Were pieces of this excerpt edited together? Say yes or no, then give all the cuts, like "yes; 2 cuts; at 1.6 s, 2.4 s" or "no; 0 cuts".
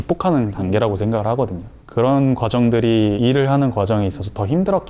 no; 0 cuts